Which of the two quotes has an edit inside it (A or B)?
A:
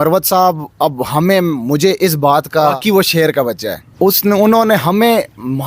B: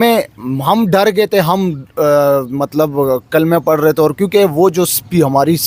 A